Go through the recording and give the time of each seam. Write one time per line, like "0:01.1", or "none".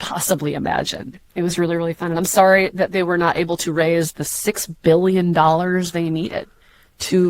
0:01.1